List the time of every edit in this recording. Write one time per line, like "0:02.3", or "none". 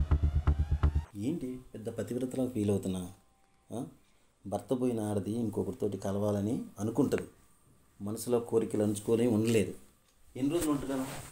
0:01.0